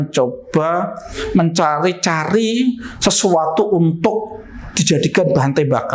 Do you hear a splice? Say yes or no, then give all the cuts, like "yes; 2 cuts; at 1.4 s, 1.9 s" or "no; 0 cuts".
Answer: no; 0 cuts